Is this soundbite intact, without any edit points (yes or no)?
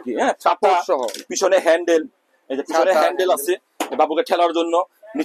yes